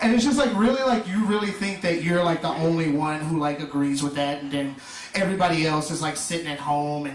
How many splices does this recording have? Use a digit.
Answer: 1